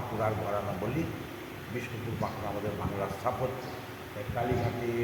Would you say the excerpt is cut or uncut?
uncut